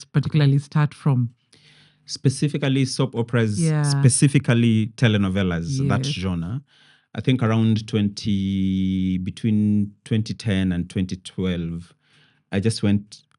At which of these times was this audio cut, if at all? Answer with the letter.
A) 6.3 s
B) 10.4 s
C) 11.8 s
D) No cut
D